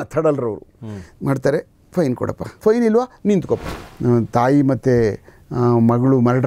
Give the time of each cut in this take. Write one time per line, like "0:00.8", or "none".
0:02.5
0:03.9